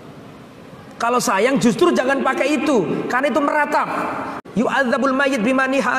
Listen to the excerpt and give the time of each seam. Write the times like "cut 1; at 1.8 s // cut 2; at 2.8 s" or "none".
cut 1; at 4.3 s